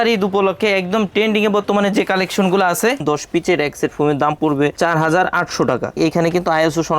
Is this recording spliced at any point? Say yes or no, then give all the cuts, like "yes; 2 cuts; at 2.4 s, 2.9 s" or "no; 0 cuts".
yes; 3 cuts; at 3.0 s, 4.7 s, 5.9 s